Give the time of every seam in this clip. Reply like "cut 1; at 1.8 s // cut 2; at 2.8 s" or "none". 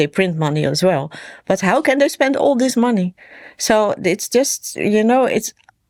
none